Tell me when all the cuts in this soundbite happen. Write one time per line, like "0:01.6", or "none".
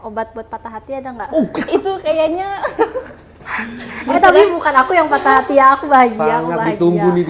none

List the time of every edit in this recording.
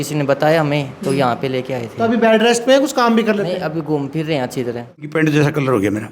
0:05.0

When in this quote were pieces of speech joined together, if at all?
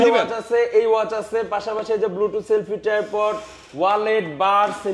none

